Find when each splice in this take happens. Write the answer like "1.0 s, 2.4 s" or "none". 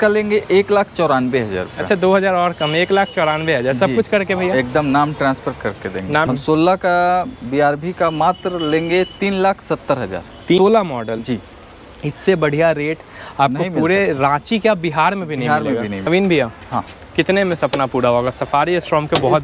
6.3 s, 10.6 s, 16.1 s